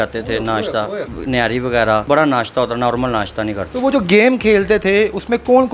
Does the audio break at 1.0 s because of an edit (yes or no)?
yes